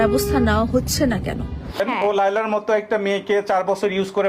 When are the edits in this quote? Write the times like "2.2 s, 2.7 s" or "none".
1.6 s